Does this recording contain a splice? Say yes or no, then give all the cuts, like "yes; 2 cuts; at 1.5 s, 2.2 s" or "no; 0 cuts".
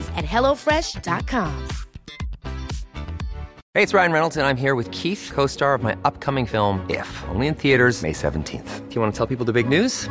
yes; 1 cut; at 3.5 s